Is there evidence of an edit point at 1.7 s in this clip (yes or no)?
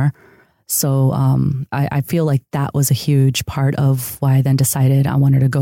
yes